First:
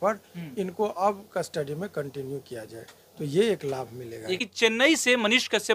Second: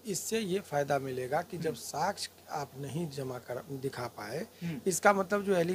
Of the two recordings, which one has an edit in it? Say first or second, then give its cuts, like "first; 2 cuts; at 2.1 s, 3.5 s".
first; 1 cut; at 4.3 s